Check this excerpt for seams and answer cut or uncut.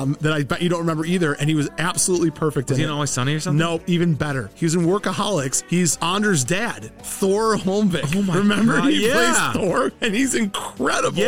uncut